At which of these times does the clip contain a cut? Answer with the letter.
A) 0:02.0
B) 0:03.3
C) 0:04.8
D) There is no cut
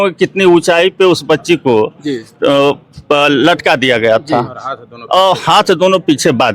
D